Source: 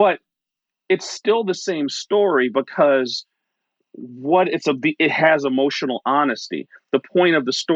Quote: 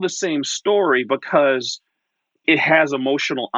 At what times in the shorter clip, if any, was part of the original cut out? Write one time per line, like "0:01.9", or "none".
0:02.4